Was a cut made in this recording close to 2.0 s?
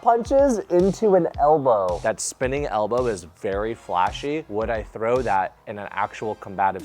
yes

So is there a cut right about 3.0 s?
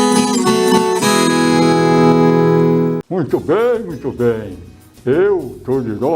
yes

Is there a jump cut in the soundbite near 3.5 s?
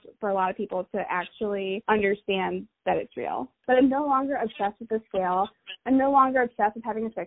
yes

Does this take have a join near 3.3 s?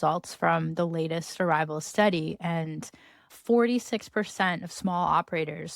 yes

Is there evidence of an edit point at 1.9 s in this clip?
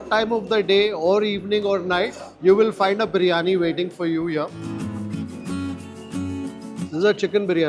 no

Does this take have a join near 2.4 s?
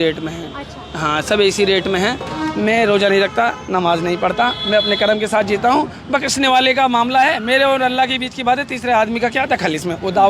yes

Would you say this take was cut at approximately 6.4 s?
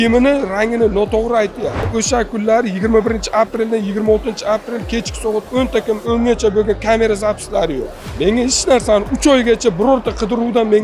no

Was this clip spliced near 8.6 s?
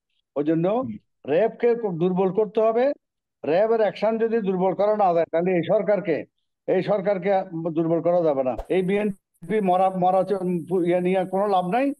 yes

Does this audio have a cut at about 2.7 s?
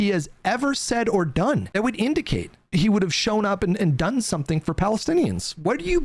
yes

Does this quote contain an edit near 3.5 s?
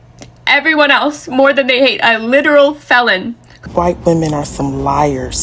yes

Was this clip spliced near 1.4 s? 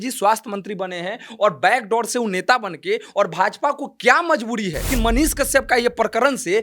no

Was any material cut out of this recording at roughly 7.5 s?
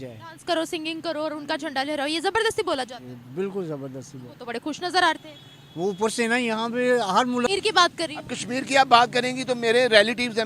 yes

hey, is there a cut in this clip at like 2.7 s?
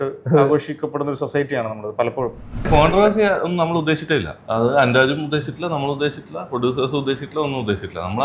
yes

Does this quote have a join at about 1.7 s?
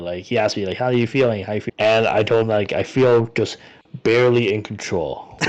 yes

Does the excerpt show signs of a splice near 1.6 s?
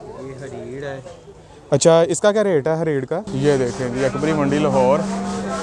no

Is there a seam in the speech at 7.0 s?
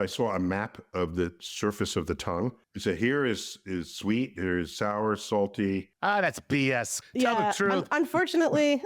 yes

